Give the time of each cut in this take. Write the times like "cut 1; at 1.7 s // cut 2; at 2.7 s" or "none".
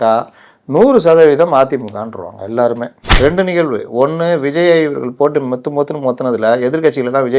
cut 1; at 3.0 s